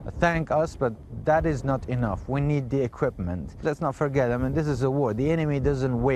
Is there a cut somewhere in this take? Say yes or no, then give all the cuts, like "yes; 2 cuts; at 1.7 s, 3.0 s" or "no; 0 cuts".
yes; 1 cut; at 3.5 s